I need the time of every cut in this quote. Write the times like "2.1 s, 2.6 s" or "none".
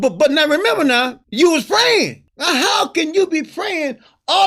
1.2 s, 2.3 s